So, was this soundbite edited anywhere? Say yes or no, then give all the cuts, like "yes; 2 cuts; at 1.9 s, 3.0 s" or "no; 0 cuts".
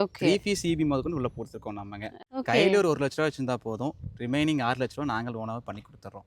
yes; 1 cut; at 2.1 s